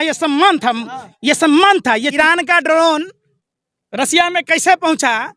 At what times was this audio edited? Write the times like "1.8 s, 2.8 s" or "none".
2.1 s